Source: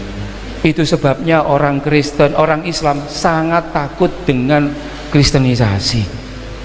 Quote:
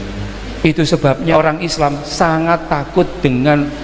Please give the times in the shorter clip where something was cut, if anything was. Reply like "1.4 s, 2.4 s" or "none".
1.3 s